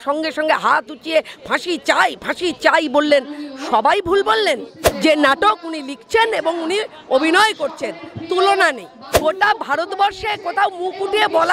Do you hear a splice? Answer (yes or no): yes